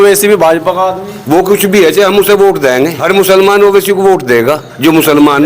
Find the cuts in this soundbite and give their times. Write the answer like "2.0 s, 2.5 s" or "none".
3.0 s

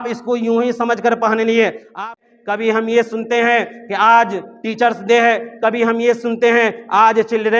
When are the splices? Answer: 2.0 s

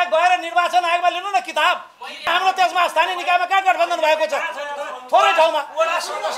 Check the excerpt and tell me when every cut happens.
2.3 s

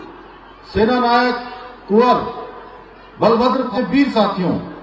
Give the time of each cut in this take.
3.7 s

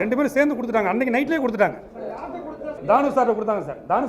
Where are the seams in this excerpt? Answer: 2.7 s

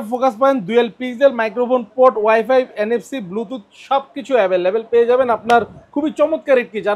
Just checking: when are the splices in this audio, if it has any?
none

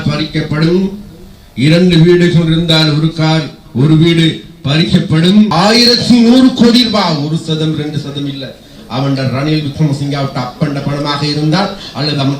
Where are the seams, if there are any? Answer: 5.5 s

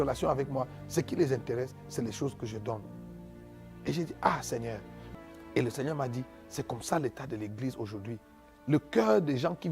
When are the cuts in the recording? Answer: 4.9 s

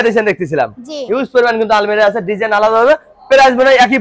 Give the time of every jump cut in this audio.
none

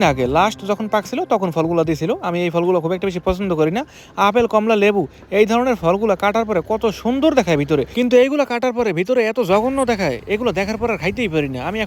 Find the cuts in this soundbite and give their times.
none

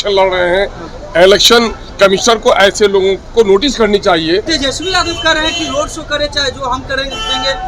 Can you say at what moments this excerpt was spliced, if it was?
4.5 s

